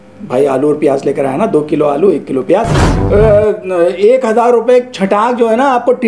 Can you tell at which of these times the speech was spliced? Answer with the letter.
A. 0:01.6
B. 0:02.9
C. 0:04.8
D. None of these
B